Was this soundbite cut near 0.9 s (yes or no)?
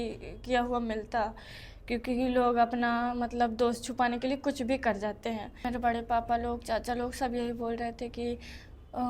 no